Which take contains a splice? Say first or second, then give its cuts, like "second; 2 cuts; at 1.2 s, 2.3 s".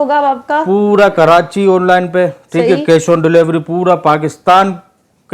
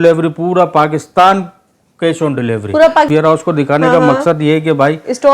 second; 1 cut; at 3.1 s